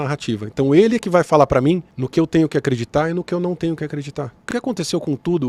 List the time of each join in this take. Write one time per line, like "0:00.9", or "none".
0:02.0
0:04.4